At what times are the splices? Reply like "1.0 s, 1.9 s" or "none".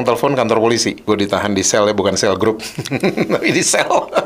1.0 s